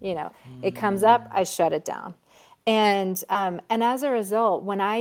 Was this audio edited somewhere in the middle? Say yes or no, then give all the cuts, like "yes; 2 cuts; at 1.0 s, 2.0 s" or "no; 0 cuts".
no; 0 cuts